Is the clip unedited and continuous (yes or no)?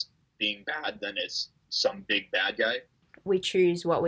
no